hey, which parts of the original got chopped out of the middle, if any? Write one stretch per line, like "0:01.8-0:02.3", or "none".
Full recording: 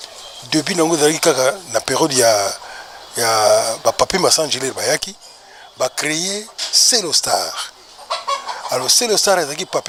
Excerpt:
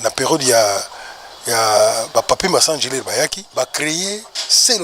0:05.1-0:05.6